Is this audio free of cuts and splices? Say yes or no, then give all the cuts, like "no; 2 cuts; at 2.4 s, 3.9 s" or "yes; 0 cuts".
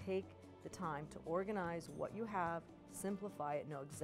yes; 0 cuts